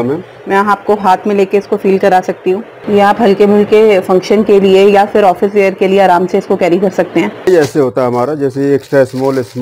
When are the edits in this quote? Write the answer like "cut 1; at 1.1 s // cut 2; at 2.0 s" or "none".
cut 1; at 2.7 s // cut 2; at 7.5 s